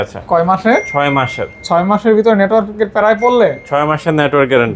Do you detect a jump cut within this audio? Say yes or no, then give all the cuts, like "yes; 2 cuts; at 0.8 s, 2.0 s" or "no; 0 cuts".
no; 0 cuts